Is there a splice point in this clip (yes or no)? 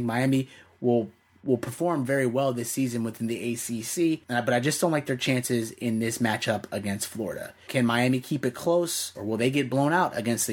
yes